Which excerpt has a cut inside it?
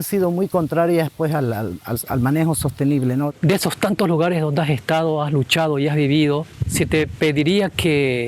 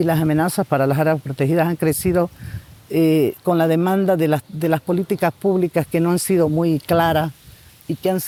first; 2 cuts; at 3.3 s, 6.6 s

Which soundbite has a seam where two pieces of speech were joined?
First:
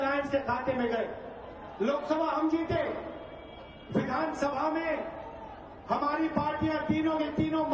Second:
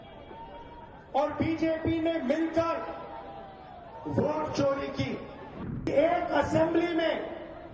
second; 1 cut; at 5.9 s

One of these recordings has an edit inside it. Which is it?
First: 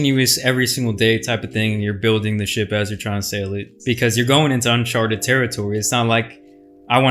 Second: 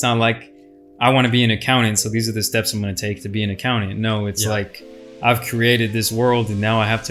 first; 1 cut; at 3.7 s

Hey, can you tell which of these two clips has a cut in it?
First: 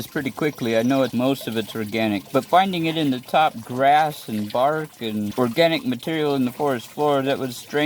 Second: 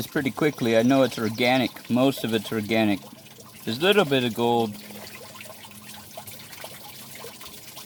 first; 3 cuts; at 1.1 s, 2.2 s, 5.3 s

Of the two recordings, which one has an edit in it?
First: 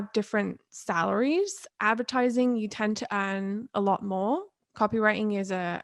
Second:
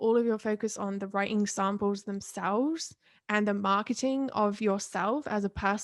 first; 1 cut; at 1.6 s

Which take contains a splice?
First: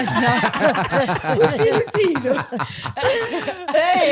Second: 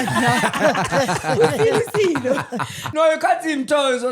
second; 1 cut; at 2.9 s

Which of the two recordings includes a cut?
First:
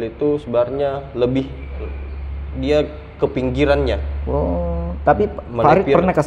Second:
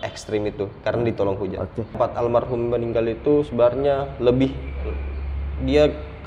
second; 1 cut; at 1.9 s

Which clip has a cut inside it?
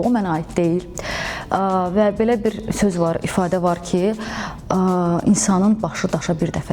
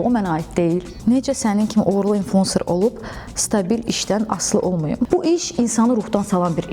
second; 2 cuts; at 0.9 s, 5.1 s

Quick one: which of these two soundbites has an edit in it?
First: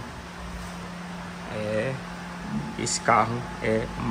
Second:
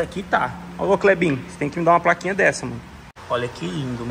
second; 1 cut; at 3.1 s

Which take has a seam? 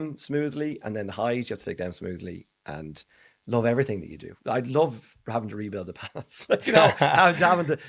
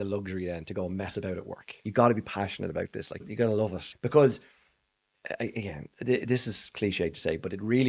second; 2 cuts; at 1.8 s, 3.3 s

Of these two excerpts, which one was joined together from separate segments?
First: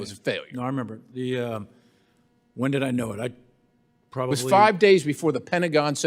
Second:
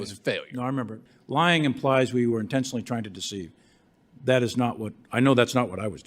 second; 1 cut; at 1.0 s

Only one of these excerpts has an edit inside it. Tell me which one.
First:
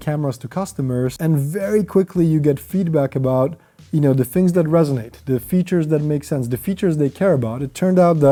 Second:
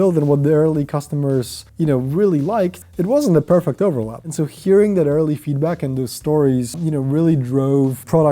second; 2 cuts; at 1.6 s, 2.8 s

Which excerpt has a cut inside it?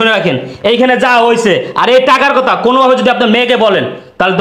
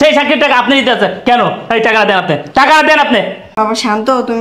second; 1 cut; at 3.5 s

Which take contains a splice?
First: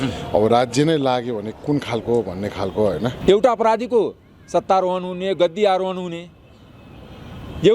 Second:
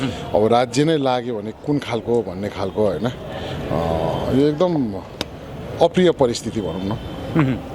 first; 1 cut; at 3.2 s

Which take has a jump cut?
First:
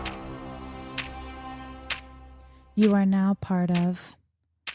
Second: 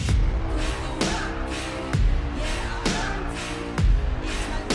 first; 1 cut; at 1.1 s

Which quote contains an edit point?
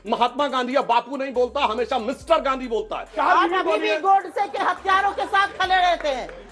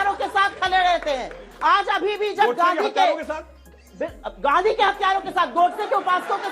first; 1 cut; at 3.1 s

